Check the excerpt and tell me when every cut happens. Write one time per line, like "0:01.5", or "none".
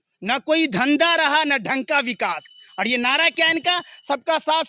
none